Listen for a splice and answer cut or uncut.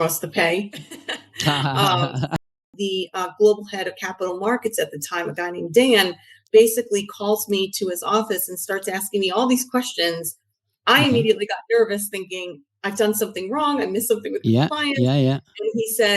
cut